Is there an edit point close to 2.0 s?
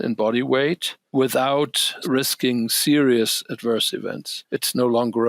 yes; 3 cuts; at 0.9 s, 2.0 s, 4.3 s

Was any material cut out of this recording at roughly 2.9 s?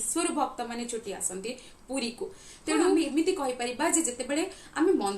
yes; 1 cut; at 2.9 s

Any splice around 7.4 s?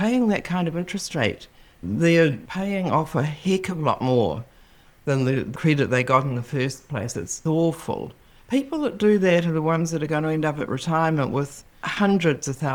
yes; 3 cuts; at 2.5 s, 5.5 s, 7.4 s

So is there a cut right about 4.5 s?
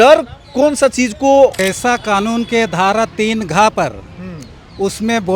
no; 1 cut; at 1.6 s

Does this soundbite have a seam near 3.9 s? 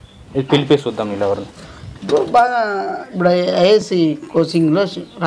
yes; 1 cut; at 3.9 s

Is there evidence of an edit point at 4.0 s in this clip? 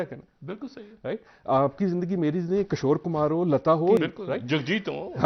yes; 1 cut; at 4.0 s

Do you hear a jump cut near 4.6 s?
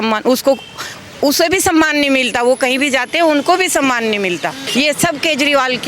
yes; 1 cut; at 4.6 s

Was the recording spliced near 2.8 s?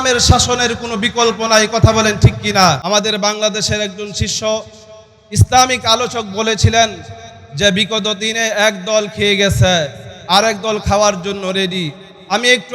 yes; 1 cut; at 2.8 s

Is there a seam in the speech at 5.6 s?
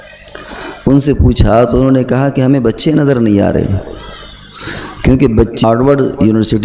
yes; 1 cut; at 5.6 s

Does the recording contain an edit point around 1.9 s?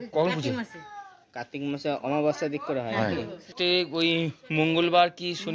no; 1 cut; at 3.4 s

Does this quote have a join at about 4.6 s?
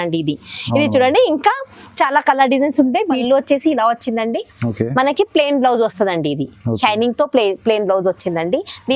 no; 1 cut; at 3.2 s

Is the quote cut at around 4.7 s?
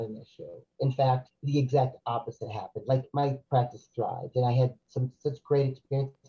no; 2 cuts; at 1.3 s, 3.2 s

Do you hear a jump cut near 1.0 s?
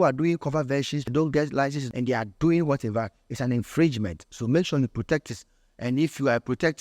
yes; 2 cuts; at 1.0 s, 1.8 s

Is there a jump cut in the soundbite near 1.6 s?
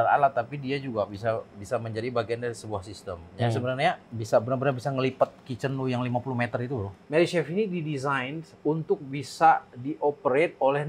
no; 2 cuts; at 4.1 s, 7.0 s

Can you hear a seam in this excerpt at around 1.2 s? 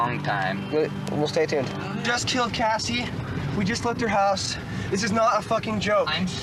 no; 0 cuts

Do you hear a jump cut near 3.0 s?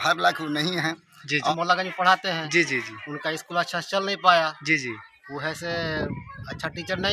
no; 1 cut; at 1.5 s

